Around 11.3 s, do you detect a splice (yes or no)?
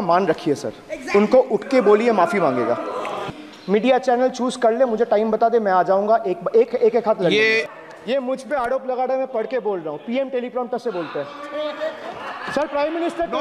no